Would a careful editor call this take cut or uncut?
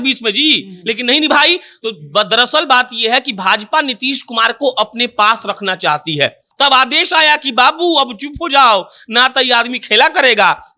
cut